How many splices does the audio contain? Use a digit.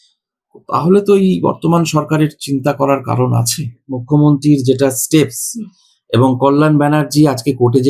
1